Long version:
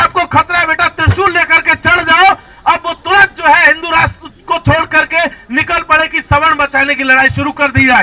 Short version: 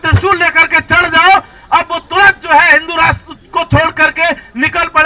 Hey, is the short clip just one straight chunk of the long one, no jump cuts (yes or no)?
yes